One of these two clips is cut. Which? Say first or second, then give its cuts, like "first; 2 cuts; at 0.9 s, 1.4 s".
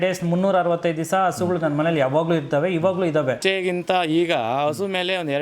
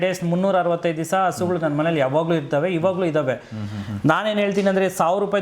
first; 1 cut; at 3.4 s